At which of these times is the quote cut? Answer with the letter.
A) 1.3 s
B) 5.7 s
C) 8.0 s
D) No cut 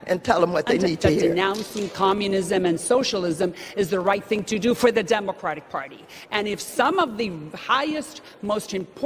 A